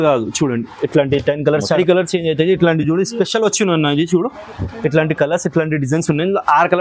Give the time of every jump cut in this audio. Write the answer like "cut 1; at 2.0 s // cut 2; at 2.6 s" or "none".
cut 1; at 1.8 s